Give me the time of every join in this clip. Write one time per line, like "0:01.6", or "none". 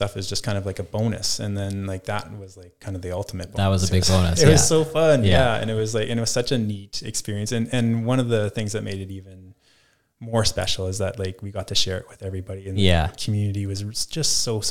none